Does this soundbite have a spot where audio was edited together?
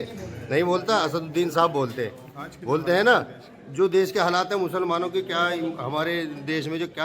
no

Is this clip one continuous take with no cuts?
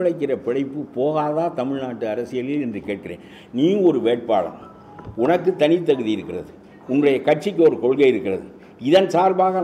yes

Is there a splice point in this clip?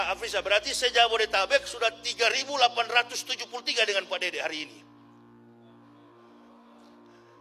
no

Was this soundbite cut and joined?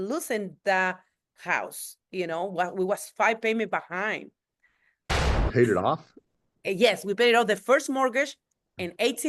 yes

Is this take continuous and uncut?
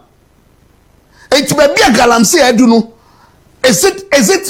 yes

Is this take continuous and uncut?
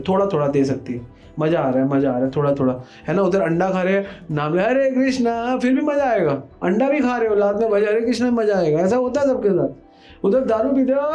yes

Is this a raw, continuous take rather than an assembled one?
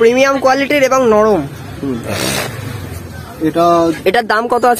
yes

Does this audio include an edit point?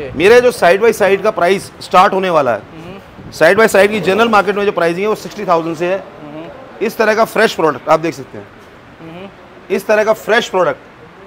no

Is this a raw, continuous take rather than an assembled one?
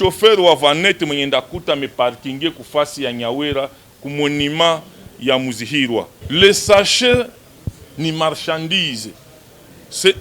no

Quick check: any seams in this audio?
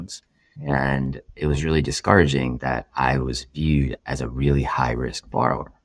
no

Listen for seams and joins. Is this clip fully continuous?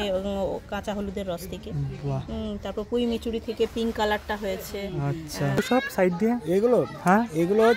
no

